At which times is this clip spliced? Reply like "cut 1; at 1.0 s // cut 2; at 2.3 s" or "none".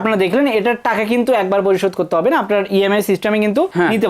none